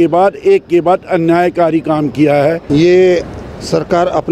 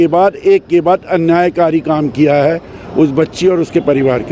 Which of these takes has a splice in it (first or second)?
first